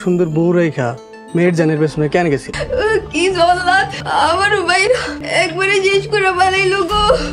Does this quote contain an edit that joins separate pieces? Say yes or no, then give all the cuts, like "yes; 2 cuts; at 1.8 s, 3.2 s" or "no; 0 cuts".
yes; 3 cuts; at 2.6 s, 4.0 s, 5.2 s